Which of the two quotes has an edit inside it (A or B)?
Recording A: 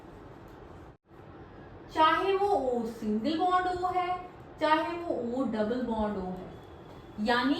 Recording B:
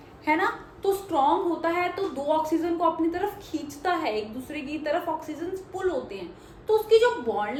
A